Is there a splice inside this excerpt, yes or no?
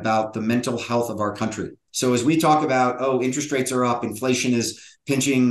yes